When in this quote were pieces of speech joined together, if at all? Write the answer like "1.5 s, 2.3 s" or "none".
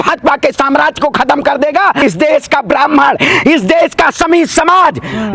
2.0 s

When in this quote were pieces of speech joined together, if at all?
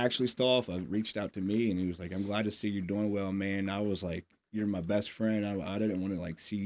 none

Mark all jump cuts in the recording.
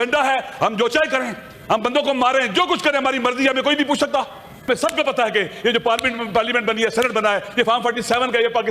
4.7 s

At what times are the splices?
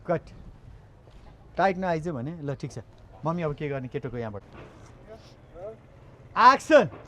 4.4 s

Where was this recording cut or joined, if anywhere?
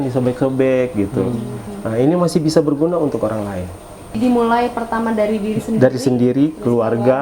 4.2 s

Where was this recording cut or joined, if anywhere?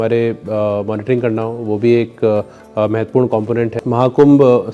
3.8 s

